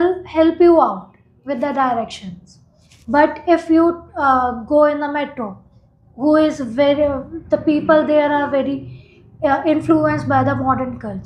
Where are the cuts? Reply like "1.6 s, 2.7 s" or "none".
none